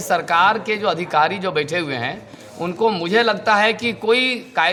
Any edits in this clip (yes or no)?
no